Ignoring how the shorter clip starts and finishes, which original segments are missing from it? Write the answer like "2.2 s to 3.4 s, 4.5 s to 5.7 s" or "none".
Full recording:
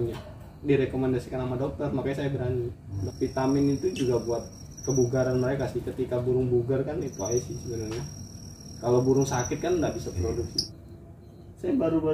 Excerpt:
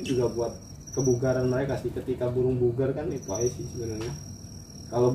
none